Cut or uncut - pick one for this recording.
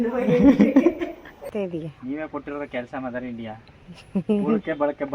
cut